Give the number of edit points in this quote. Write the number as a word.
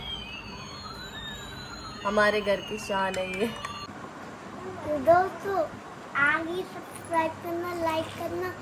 one